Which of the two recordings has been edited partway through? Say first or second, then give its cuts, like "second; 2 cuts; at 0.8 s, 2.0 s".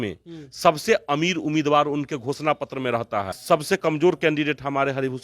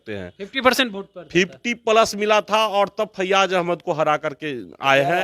first; 1 cut; at 3.3 s